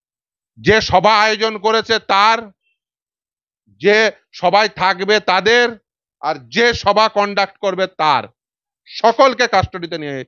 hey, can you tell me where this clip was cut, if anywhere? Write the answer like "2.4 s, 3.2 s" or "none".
none